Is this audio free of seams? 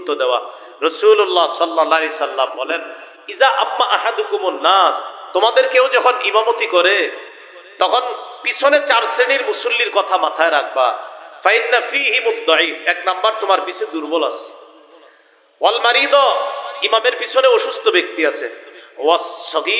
yes; 0 cuts

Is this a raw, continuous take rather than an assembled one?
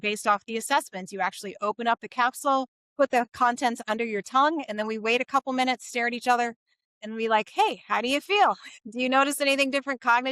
no; 1 cut; at 2.8 s

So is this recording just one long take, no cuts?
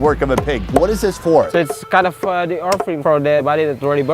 no; 1 cut; at 3.1 s

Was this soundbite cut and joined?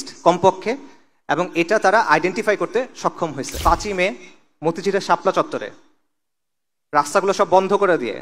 yes; 1 cut; at 3.5 s

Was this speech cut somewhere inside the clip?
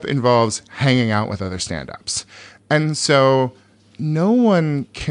no; 0 cuts

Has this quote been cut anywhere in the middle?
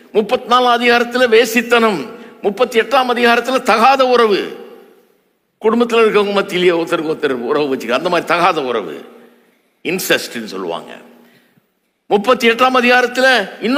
no; 0 cuts

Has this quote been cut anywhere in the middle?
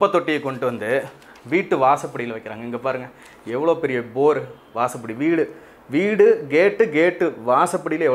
no; 0 cuts

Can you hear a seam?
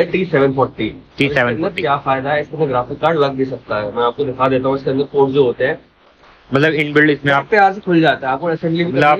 no; 0 cuts

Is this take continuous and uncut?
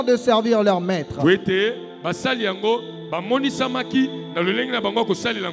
yes; 0 cuts

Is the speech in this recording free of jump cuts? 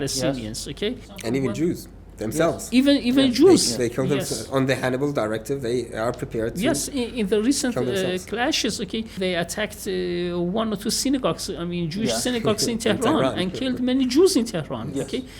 no; 2 cuts; at 1.1 s, 9.1 s

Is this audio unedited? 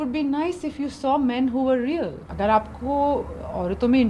no; 1 cut; at 2.2 s

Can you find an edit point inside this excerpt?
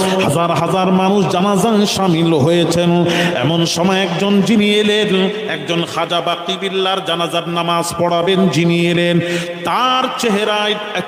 no; 0 cuts

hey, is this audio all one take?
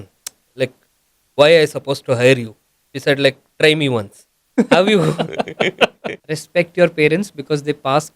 no; 1 cut; at 6.1 s

